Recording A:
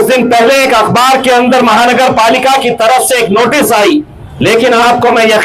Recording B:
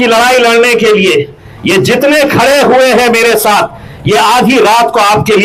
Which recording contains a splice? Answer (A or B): A